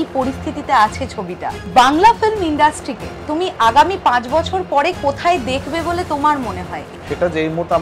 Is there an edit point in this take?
yes; 2 cuts; at 1.6 s, 6.8 s

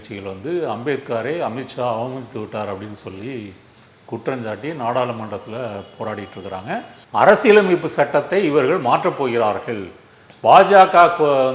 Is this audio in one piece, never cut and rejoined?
no; 1 cut; at 7.0 s

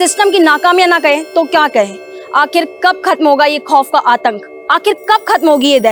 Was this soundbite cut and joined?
no; 0 cuts

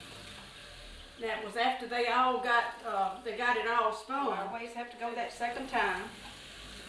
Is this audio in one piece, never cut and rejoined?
no; 1 cut; at 4.6 s

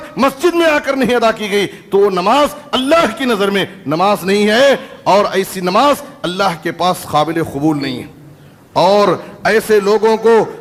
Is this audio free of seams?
yes; 0 cuts

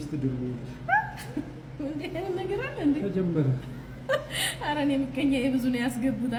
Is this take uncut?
yes; 0 cuts

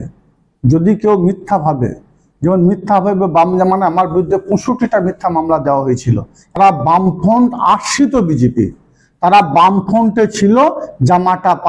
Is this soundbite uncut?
no; 1 cut; at 6.6 s

